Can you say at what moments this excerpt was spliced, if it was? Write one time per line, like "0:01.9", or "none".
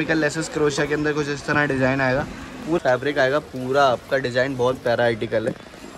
0:02.8